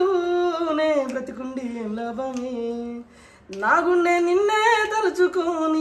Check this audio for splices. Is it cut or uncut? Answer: uncut